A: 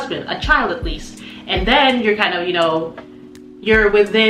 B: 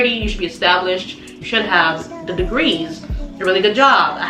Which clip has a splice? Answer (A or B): B